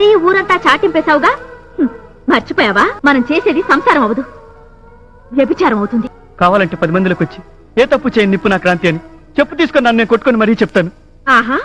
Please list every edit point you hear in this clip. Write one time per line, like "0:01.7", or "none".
0:02.9
0:06.2